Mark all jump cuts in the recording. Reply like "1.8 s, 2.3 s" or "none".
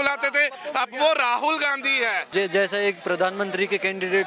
2.3 s